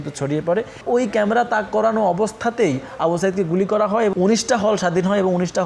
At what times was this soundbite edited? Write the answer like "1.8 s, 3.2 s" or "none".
0.8 s, 4.1 s